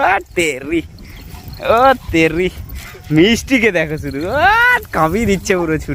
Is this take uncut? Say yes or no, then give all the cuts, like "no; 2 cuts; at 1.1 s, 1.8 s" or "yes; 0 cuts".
yes; 0 cuts